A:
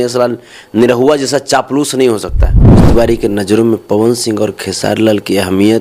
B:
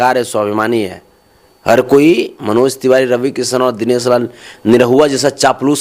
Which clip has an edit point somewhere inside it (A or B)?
A